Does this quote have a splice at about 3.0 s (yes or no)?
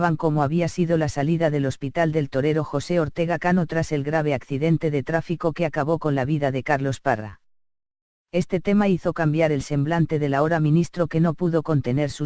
no